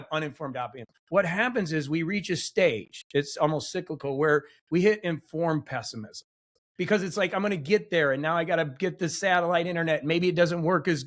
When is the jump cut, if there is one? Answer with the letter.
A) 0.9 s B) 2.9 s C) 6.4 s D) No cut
A